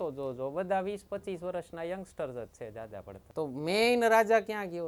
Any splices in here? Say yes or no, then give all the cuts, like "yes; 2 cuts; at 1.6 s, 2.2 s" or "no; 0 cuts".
yes; 1 cut; at 3.2 s